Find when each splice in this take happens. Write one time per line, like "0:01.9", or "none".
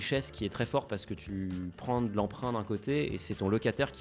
0:01.2

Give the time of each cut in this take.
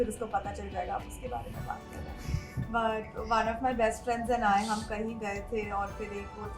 none

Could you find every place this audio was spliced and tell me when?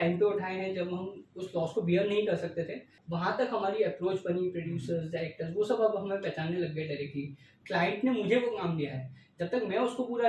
0:03.0
0:07.5

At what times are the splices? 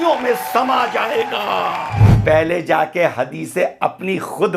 0:02.0

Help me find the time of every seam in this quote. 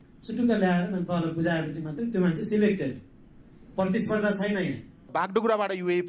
0:04.9

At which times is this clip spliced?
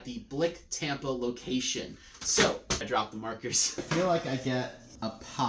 0:03.8

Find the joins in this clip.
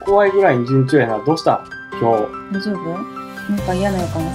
none

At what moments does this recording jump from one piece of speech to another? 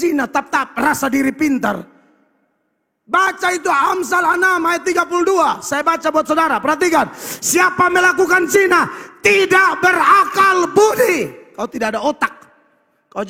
none

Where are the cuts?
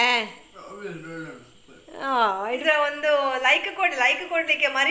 0:02.5

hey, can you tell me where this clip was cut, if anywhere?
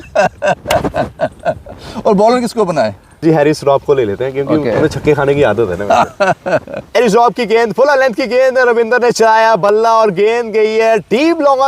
0:03.2
0:07.0

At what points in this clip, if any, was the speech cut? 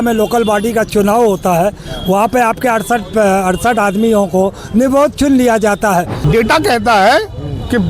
0:06.2

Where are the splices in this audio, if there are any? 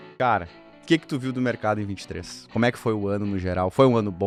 none

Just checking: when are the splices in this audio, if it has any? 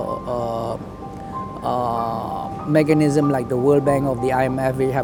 none

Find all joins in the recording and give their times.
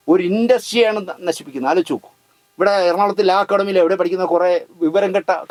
none

